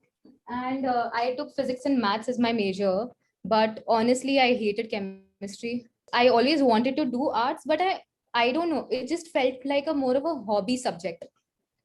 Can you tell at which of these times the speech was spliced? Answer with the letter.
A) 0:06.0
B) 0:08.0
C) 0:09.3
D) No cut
A